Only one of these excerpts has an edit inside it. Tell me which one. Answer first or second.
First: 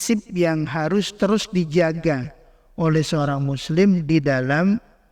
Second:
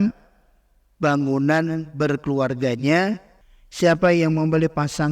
second